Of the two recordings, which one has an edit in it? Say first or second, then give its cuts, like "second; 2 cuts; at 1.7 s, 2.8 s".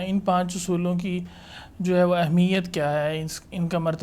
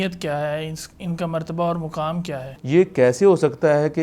second; 1 cut; at 2.5 s